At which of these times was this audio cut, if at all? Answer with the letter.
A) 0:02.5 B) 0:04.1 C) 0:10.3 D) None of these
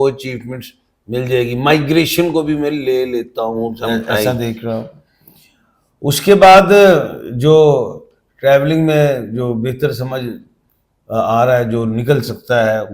B